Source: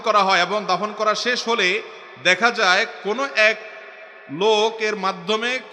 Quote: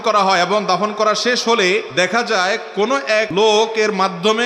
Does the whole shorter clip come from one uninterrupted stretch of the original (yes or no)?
no